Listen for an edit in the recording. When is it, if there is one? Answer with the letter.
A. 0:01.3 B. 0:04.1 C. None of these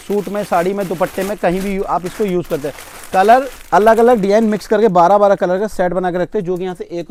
C